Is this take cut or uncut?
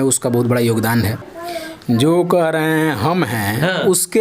cut